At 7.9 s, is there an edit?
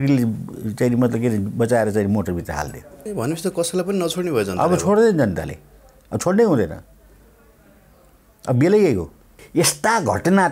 no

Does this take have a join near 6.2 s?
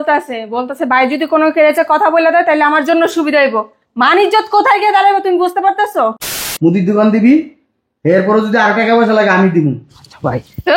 yes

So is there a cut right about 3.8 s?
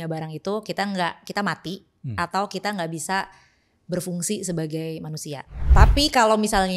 no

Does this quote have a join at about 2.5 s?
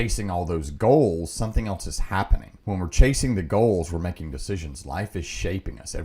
yes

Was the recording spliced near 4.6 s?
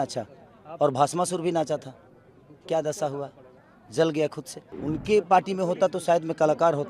yes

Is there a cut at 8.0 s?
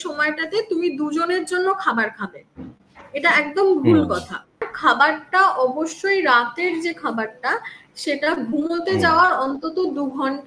no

